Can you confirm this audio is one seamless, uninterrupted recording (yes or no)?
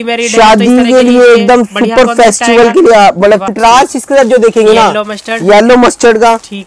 no